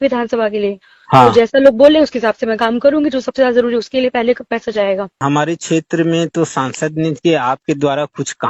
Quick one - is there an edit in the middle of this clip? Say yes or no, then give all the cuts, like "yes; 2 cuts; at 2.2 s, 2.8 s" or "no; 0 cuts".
yes; 1 cut; at 5.1 s